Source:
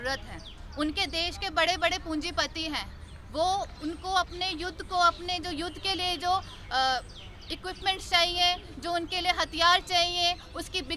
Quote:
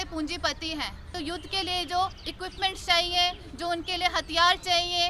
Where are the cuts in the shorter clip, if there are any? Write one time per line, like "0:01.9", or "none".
0:01.1
0:02.2